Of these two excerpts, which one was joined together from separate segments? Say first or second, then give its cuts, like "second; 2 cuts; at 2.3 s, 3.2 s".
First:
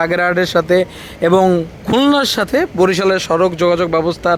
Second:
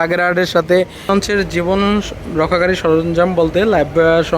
second; 1 cut; at 1.1 s